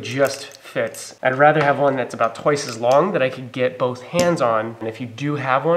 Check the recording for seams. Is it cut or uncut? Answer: cut